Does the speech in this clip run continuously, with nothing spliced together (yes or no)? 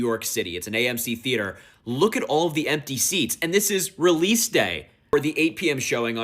no